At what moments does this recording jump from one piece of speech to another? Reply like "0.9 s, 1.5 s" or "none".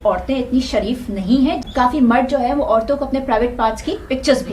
1.6 s